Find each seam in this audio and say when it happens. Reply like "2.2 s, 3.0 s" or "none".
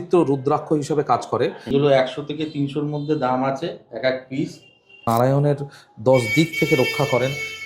1.7 s, 5.0 s